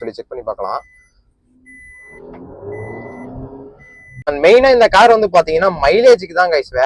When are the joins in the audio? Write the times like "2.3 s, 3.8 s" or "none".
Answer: 4.3 s